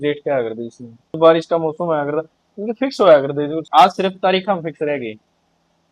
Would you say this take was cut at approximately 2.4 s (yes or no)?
no